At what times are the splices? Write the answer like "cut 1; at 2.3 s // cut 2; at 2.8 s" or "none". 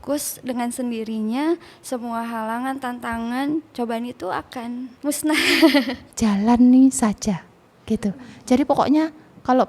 cut 1; at 4.9 s // cut 2; at 6.0 s